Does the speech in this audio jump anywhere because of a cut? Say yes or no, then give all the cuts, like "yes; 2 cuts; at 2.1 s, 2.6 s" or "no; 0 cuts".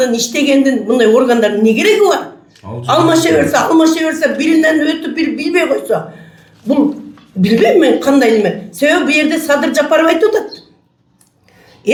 no; 0 cuts